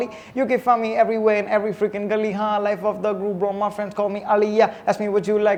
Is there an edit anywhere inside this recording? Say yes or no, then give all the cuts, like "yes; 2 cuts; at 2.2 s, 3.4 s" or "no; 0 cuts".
no; 0 cuts